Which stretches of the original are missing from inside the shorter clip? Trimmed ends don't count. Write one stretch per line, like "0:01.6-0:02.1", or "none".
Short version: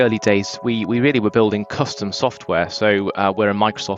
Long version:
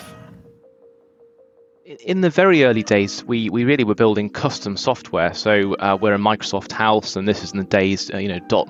none